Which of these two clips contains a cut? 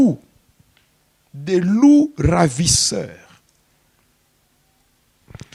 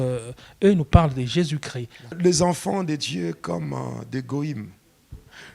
second; 1 cut; at 2.2 s

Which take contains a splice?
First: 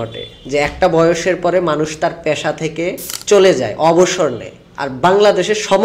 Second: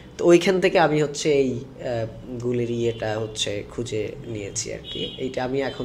first; 1 cut; at 3.1 s

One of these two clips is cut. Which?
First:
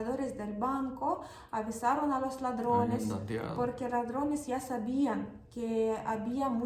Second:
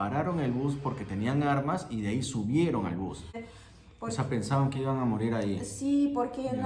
second; 1 cut; at 3.4 s

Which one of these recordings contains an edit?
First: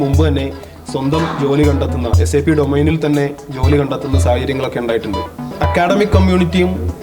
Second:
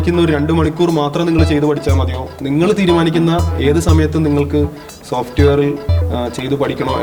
first; 1 cut; at 5.5 s

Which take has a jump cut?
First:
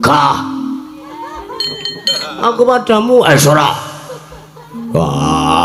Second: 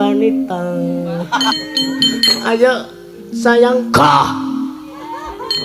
second; 1 cut; at 1.5 s

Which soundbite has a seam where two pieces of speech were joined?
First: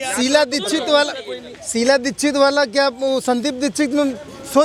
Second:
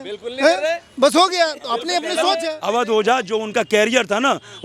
second; 1 cut; at 2.5 s

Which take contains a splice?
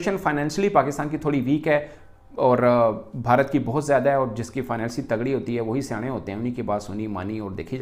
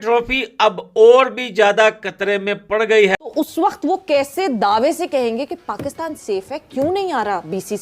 second; 1 cut; at 3.3 s

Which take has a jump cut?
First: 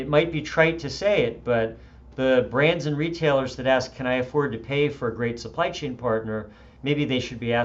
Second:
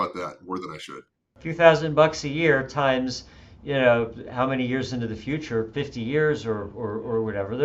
second; 1 cut; at 0.9 s

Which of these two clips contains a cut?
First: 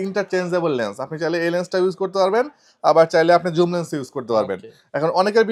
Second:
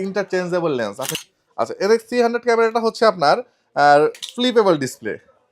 second; 1 cut; at 1.1 s

